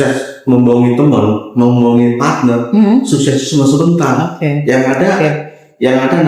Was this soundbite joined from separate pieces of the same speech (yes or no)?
no